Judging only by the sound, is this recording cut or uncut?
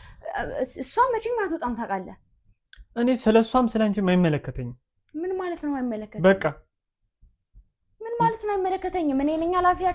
uncut